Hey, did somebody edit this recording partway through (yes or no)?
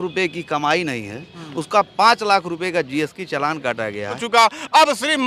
yes